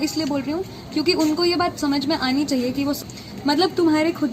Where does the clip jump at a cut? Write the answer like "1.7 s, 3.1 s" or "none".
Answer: 3.0 s